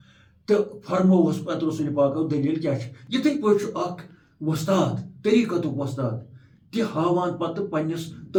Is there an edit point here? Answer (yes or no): no